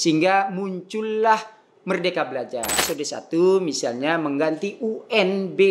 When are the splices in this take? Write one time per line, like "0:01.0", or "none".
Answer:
0:02.8